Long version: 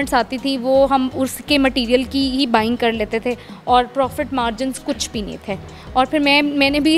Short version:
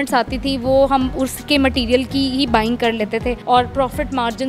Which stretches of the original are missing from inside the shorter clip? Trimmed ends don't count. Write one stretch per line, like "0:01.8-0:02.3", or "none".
0:03.4-0:03.6